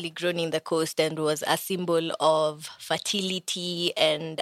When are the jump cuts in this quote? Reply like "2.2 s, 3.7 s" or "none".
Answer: none